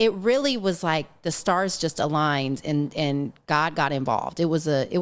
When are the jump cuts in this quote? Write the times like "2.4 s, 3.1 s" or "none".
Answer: none